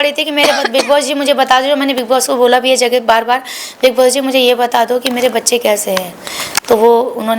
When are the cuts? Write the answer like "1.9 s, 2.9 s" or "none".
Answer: none

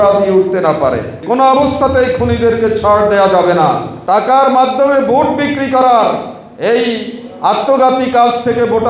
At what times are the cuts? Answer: 1.1 s, 3.9 s

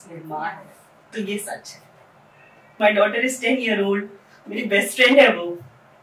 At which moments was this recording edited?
2.7 s

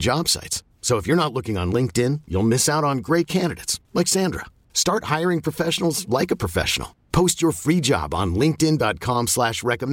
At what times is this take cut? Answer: none

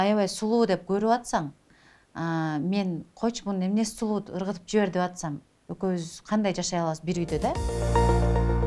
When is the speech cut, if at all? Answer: 7.6 s

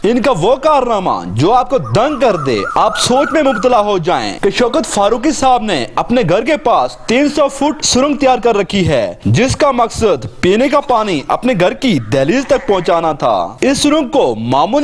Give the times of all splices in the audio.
none

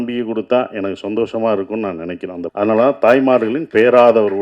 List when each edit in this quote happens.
2.4 s

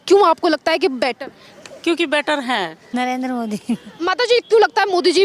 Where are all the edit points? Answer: 2.8 s

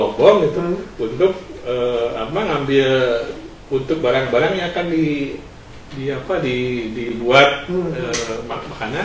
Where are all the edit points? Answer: none

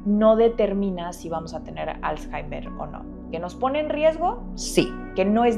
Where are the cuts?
none

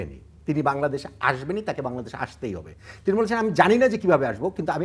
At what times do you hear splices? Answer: none

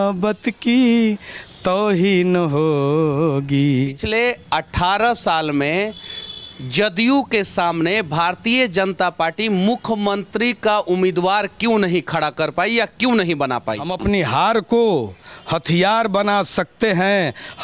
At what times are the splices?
4.0 s, 13.9 s

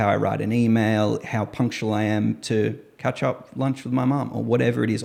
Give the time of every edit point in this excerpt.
none

